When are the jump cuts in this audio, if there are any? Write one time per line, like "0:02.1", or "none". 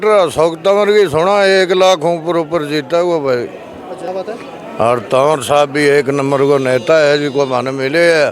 0:04.1